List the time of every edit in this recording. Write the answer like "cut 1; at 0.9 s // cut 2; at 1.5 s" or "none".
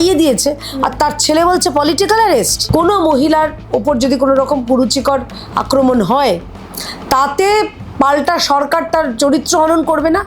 cut 1; at 2.6 s

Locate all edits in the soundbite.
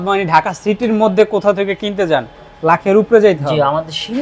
none

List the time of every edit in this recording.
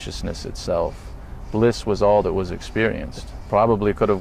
cut 1; at 3.3 s

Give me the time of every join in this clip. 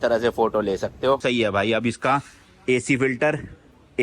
cut 1; at 1.2 s

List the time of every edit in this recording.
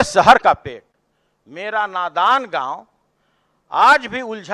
none

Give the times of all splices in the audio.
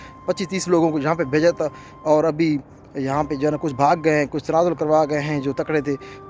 none

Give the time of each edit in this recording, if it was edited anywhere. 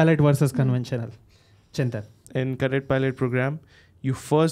cut 1; at 2.2 s

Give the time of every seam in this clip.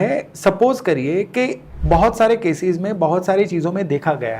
cut 1; at 1.7 s

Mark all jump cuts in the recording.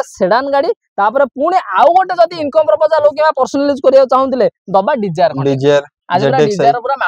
none

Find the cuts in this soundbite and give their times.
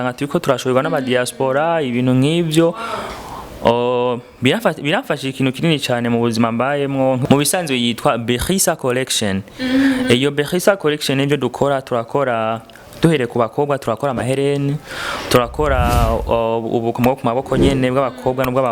cut 1; at 7.2 s

